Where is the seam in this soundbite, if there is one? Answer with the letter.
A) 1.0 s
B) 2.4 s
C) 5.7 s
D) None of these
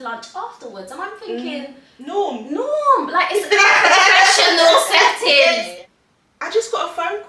C